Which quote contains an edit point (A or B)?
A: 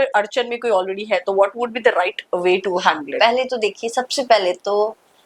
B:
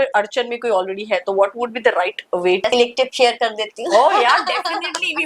B